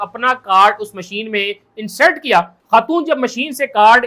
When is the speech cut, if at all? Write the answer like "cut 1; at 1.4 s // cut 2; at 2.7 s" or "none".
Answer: cut 1; at 2.6 s